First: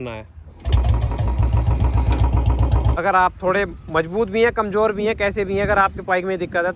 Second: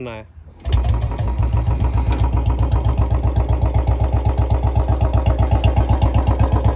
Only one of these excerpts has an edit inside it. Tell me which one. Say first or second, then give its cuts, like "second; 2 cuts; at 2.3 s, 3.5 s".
first; 1 cut; at 2.9 s